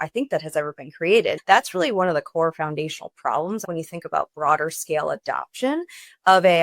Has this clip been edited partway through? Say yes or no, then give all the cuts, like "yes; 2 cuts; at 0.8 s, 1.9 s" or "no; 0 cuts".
yes; 2 cuts; at 1.4 s, 3.6 s